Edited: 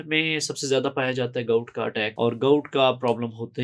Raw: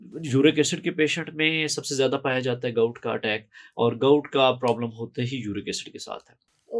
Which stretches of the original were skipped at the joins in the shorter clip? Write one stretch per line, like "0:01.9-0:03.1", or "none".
0:03.4-0:03.7